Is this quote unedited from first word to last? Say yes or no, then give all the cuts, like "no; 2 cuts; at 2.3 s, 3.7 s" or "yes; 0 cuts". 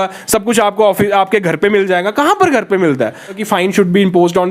no; 1 cut; at 3.4 s